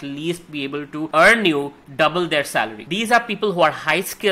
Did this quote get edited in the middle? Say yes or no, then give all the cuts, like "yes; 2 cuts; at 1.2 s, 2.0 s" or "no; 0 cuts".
yes; 2 cuts; at 1.1 s, 2.8 s